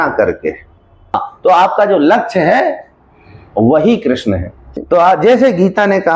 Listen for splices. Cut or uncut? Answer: cut